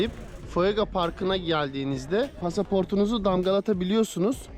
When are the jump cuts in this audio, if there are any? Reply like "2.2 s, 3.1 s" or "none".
2.4 s